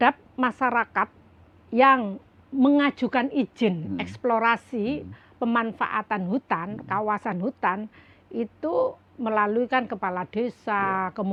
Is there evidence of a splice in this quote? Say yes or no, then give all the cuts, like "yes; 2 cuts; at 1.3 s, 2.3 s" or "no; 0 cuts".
no; 0 cuts